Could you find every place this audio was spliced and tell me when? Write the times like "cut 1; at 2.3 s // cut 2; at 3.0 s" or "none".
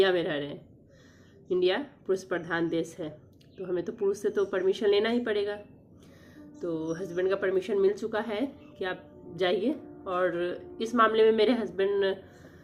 none